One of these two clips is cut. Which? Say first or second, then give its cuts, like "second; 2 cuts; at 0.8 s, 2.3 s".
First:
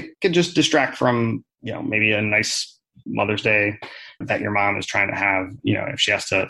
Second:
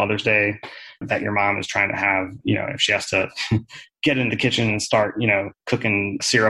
first; 1 cut; at 1.6 s